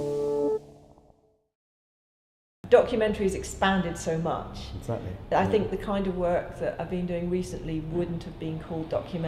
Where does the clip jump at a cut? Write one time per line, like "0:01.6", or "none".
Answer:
none